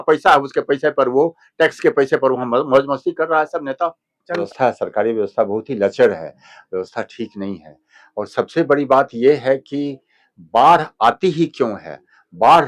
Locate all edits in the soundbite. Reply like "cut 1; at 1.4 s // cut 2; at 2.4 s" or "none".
cut 1; at 4.4 s